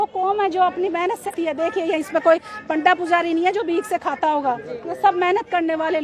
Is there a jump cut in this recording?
yes; 1 cut; at 1.3 s

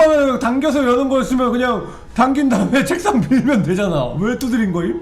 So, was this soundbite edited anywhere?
no; 0 cuts

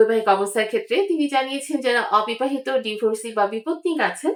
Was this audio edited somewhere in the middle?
no; 0 cuts

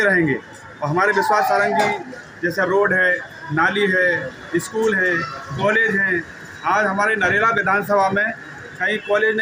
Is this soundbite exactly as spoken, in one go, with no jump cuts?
yes; 0 cuts

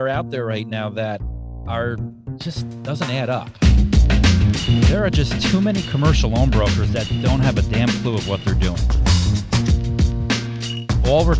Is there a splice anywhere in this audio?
yes; 1 cut; at 3.5 s

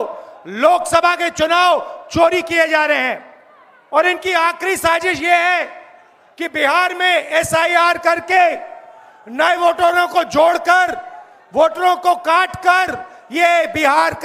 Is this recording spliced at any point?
no; 0 cuts

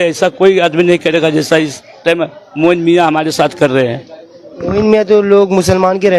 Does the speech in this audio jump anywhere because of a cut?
no; 0 cuts

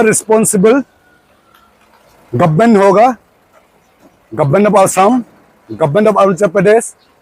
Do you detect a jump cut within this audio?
no; 0 cuts

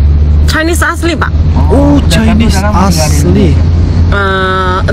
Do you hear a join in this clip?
no; 0 cuts

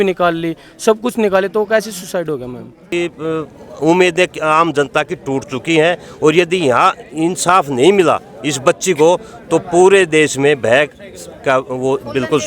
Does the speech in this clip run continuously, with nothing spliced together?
no; 1 cut; at 2.9 s

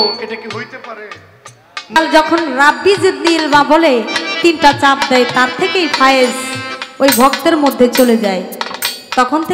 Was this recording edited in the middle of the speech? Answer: yes; 1 cut; at 2.0 s

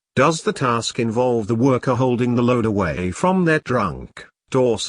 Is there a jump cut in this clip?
yes; 1 cut; at 1.4 s

